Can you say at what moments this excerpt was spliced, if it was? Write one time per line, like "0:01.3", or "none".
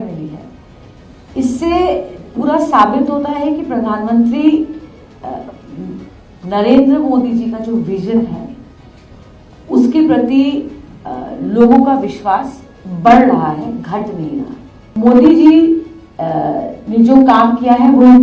0:14.9